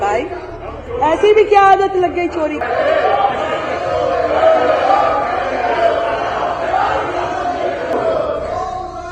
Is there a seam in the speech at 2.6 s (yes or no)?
yes